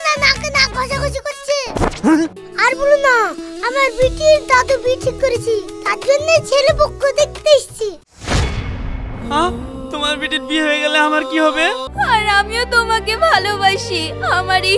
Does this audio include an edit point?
yes; 2 cuts; at 2.4 s, 11.8 s

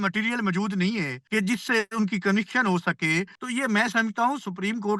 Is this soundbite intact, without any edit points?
no; 2 cuts; at 1.2 s, 3.4 s

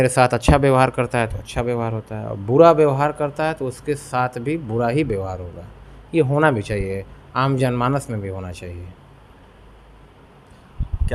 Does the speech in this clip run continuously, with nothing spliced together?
yes; 0 cuts

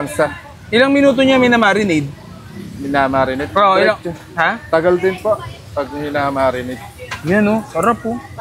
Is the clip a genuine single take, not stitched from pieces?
yes; 0 cuts

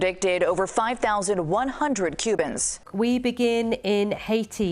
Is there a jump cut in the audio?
yes; 1 cut; at 2.8 s

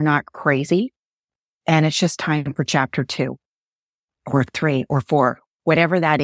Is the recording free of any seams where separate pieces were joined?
yes; 0 cuts

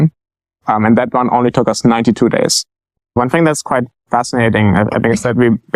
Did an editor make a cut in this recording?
yes; 1 cut; at 3.1 s

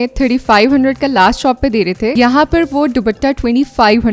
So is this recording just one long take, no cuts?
no; 1 cut; at 2.1 s

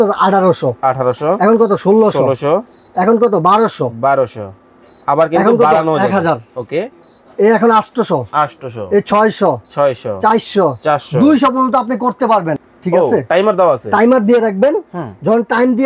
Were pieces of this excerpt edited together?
yes; 1 cut; at 12.6 s

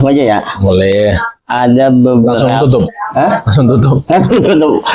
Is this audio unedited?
yes; 0 cuts

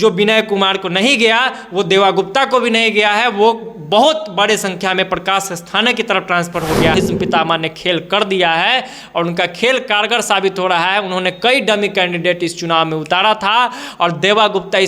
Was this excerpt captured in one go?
no; 1 cut; at 6.9 s

